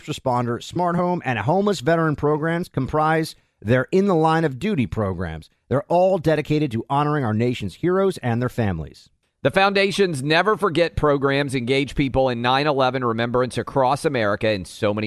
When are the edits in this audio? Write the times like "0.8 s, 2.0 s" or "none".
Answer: none